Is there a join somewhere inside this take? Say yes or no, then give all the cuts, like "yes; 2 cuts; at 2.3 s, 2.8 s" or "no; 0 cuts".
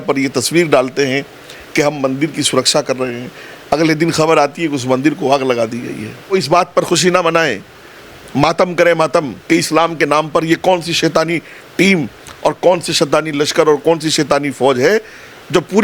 yes; 1 cut; at 6.3 s